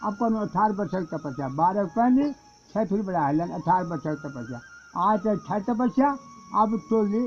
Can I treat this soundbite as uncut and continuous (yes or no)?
yes